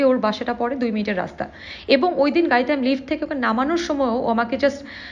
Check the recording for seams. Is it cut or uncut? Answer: uncut